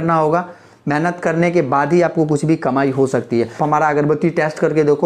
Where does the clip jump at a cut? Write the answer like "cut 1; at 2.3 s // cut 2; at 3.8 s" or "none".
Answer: cut 1; at 3.6 s